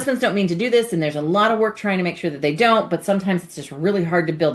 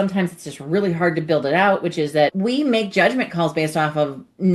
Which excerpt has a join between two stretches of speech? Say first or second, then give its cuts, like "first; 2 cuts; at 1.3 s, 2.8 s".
second; 1 cut; at 2.3 s